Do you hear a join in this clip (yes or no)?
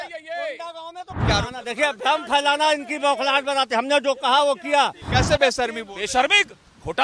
yes